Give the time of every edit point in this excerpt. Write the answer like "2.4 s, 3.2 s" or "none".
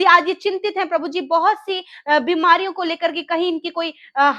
none